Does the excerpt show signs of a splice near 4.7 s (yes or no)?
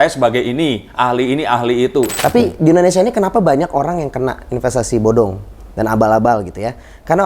no